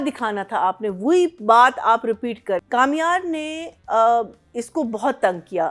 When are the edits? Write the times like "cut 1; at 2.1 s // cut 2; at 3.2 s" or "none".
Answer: cut 1; at 2.6 s